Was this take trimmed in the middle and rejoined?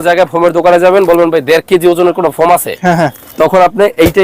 no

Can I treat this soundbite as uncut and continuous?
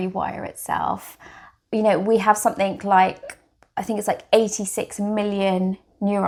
yes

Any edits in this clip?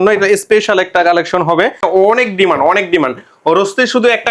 yes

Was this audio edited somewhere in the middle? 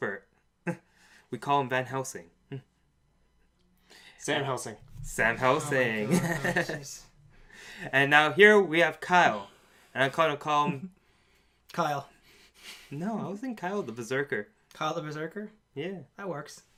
no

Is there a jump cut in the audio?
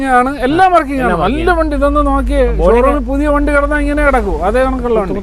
no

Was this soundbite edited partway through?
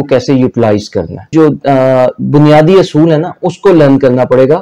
yes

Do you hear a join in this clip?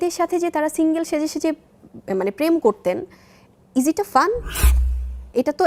no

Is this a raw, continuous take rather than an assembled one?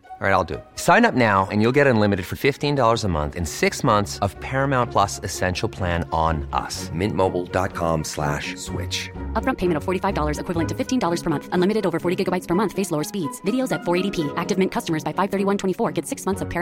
yes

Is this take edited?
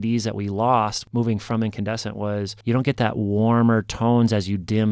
yes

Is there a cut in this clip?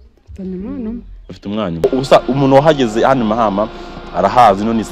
yes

